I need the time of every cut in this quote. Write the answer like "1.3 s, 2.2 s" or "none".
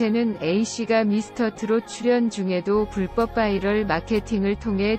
none